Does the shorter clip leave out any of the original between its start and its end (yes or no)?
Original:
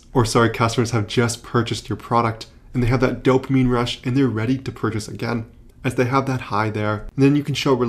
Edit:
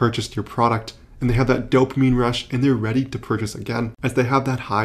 yes